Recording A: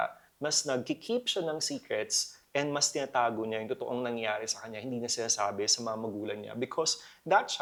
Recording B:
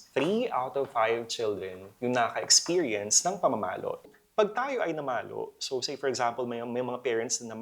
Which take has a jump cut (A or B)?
B